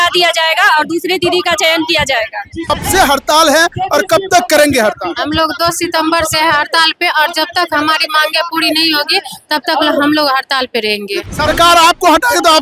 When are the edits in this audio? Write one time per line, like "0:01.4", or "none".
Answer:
0:02.7
0:11.2